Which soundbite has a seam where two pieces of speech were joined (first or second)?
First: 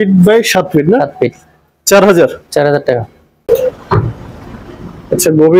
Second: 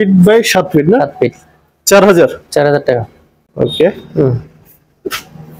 first